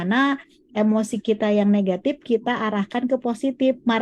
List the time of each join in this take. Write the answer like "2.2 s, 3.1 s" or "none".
none